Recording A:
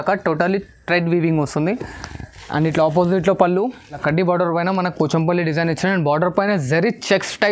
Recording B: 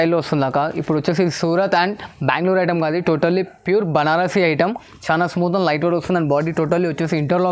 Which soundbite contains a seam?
A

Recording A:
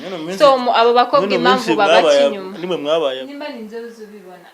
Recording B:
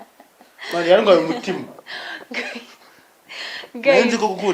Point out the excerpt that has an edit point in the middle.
A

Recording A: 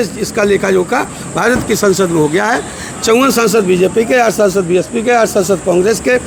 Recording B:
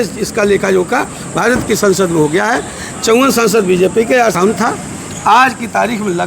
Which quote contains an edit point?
B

